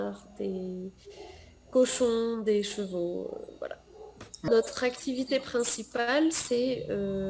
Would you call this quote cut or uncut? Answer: cut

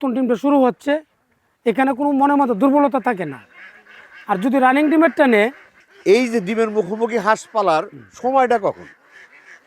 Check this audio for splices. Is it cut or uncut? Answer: cut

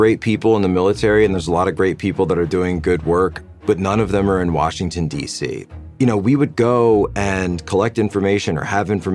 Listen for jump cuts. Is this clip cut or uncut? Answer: uncut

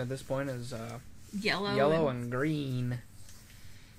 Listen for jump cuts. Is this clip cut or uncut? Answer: uncut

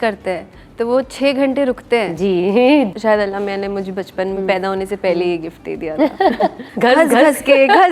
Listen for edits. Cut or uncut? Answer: cut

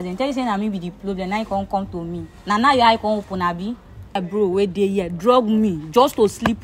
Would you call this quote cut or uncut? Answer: cut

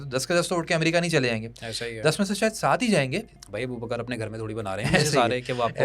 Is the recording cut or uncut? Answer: cut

